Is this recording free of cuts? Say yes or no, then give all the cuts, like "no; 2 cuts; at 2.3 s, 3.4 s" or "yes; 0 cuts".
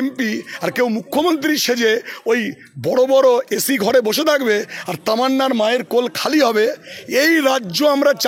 yes; 0 cuts